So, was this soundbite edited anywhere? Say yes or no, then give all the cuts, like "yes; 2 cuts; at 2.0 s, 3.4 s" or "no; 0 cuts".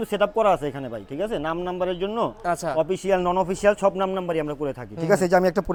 no; 0 cuts